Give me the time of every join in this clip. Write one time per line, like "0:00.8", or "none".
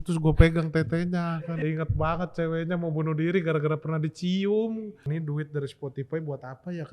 0:01.6
0:05.0